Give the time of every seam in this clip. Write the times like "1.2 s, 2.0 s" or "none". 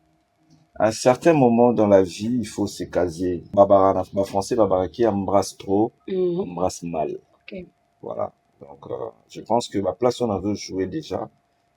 3.5 s